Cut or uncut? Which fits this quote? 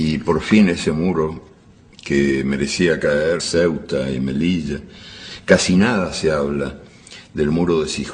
uncut